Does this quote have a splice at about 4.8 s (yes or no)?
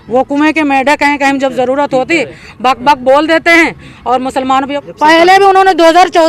yes